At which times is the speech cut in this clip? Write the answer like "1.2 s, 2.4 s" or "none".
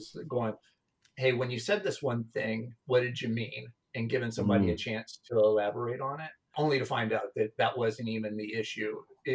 6.5 s